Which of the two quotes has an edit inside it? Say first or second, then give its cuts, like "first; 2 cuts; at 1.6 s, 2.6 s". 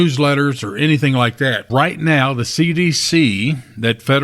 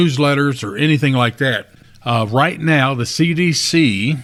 first; 1 cut; at 1.7 s